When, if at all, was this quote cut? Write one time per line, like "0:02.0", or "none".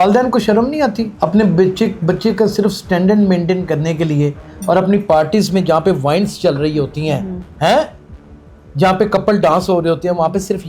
0:01.1